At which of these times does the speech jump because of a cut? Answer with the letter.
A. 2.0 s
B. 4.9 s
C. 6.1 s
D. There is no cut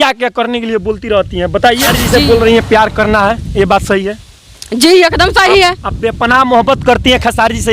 A